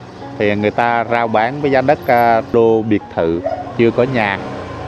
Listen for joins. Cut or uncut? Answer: cut